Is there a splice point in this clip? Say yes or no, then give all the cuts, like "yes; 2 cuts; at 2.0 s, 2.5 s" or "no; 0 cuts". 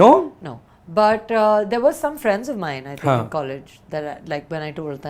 no; 0 cuts